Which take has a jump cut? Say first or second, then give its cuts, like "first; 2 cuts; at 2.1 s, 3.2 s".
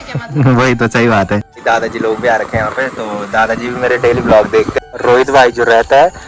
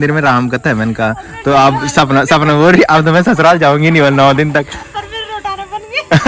first; 2 cuts; at 1.5 s, 4.9 s